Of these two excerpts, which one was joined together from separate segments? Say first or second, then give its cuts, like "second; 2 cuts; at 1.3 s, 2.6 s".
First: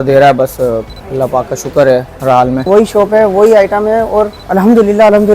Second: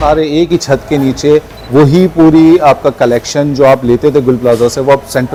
first; 3 cuts; at 1.0 s, 2.6 s, 4.4 s